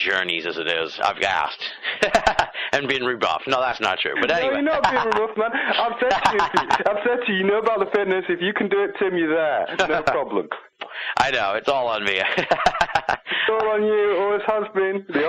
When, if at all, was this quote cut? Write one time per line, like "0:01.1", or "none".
none